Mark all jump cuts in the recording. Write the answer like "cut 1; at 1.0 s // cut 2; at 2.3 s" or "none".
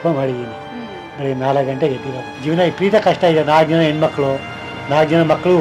cut 1; at 2.3 s